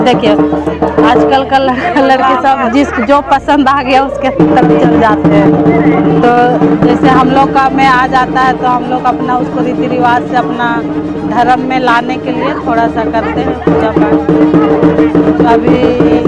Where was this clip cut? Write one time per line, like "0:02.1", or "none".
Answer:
none